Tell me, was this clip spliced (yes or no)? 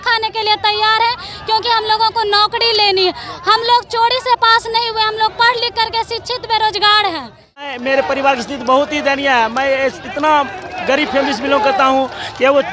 yes